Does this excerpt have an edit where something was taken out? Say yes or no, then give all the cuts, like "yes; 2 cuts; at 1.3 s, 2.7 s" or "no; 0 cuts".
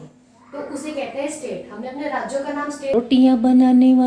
yes; 1 cut; at 2.8 s